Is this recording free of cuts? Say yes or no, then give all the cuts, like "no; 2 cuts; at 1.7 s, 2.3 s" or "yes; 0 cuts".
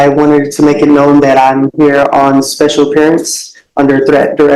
yes; 0 cuts